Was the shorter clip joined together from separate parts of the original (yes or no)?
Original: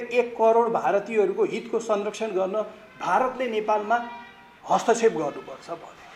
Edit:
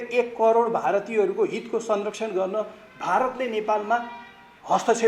no